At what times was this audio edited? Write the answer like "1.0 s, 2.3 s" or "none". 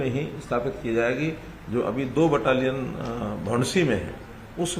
none